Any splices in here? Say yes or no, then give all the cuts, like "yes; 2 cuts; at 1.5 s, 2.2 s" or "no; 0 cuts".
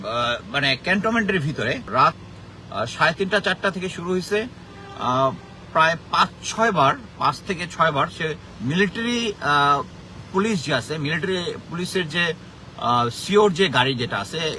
yes; 2 cuts; at 1.8 s, 8.5 s